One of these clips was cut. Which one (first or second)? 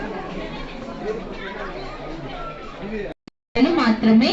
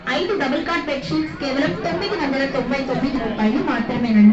first